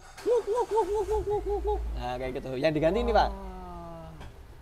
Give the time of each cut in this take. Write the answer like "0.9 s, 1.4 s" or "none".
none